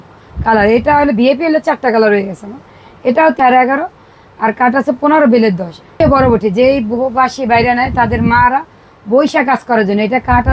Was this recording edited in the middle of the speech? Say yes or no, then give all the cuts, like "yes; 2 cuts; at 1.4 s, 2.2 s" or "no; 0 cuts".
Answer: yes; 2 cuts; at 3.4 s, 5.9 s